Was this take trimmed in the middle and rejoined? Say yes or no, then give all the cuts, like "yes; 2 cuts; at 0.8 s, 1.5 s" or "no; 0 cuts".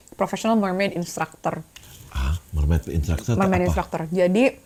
no; 0 cuts